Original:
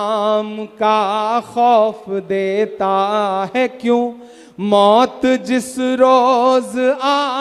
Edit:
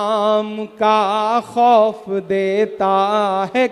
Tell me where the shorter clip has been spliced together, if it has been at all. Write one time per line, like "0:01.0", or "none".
none